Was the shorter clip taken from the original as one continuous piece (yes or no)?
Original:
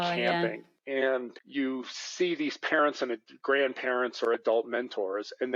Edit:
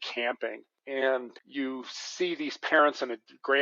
yes